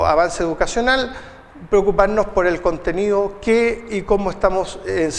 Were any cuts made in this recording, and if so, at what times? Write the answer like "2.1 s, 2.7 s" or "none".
3.8 s